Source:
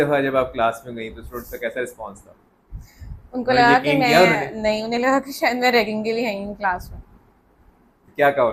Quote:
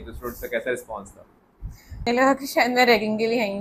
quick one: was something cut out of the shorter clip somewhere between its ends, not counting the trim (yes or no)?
yes